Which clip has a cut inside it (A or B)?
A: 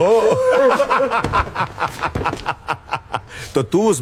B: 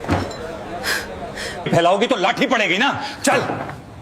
B